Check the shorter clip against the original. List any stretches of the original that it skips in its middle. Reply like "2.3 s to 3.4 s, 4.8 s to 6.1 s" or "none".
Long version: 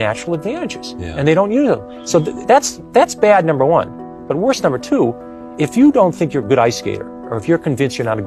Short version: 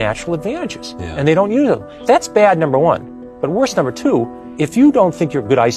1.9 s to 2.8 s, 5.3 s to 5.4 s